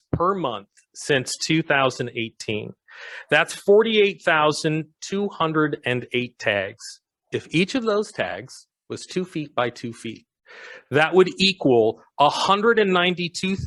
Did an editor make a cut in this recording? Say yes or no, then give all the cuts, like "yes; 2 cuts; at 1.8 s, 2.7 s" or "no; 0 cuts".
no; 0 cuts